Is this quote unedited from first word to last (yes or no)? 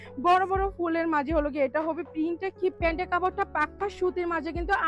no